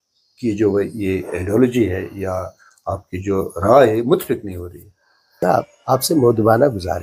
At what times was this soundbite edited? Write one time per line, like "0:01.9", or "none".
0:05.4